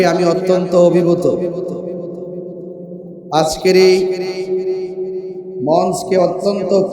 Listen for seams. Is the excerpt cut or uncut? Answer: uncut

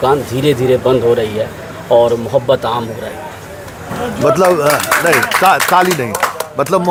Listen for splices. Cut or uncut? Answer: uncut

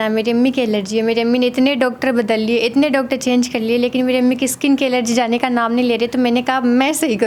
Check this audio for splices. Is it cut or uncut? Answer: uncut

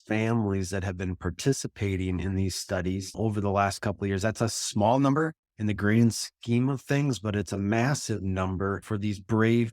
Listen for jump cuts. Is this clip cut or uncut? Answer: cut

